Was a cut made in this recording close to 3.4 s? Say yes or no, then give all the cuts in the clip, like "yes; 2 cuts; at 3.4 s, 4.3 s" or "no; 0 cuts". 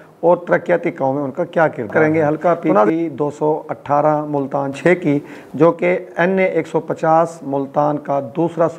no; 1 cut; at 1.9 s